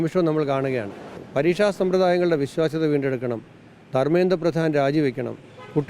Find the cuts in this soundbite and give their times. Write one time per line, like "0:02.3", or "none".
0:01.1